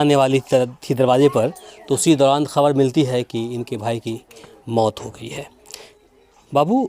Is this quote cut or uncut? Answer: uncut